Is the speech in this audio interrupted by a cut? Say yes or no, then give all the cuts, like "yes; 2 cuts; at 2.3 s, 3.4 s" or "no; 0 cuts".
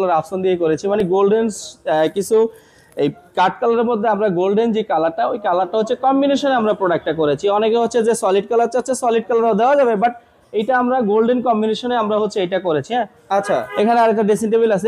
no; 0 cuts